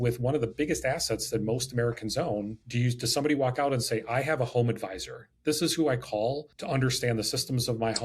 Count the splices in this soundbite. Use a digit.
2